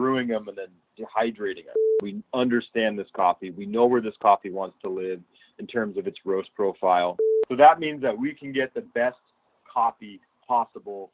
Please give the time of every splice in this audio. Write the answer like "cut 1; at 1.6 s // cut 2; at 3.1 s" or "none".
cut 1; at 1.9 s // cut 2; at 7.2 s